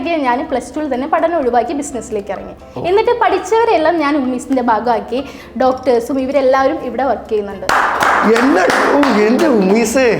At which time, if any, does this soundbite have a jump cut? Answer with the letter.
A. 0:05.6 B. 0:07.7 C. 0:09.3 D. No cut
B